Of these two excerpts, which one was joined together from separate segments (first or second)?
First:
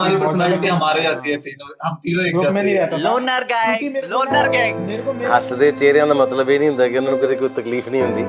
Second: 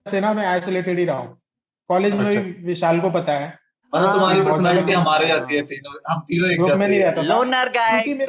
first